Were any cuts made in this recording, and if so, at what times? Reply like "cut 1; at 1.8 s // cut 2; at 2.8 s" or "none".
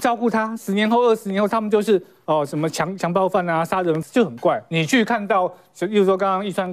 cut 1; at 4.0 s

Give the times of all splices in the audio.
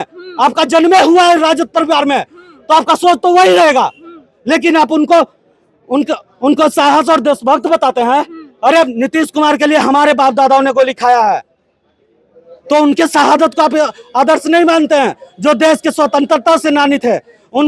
none

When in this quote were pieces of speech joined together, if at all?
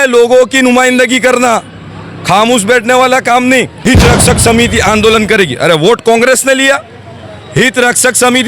cut 1; at 3.7 s

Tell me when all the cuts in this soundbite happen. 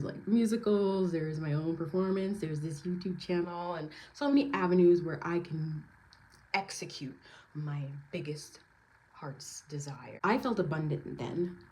cut 1; at 10.1 s

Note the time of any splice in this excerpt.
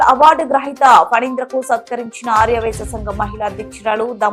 none

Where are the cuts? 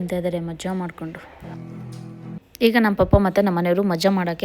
cut 1; at 2.4 s

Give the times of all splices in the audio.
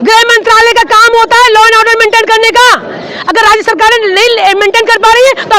none

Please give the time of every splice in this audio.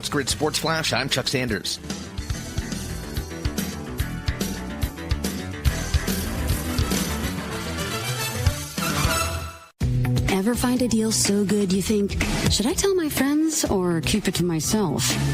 none

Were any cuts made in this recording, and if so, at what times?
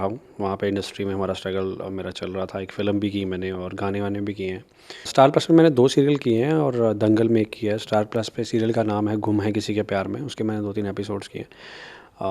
cut 1; at 5.1 s

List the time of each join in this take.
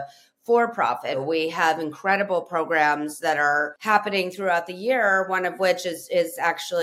cut 1; at 1.2 s // cut 2; at 3.7 s

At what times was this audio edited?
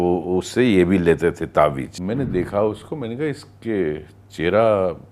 cut 1; at 1.9 s

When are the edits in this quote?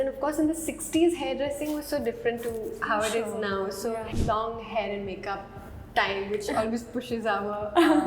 cut 1; at 4.1 s

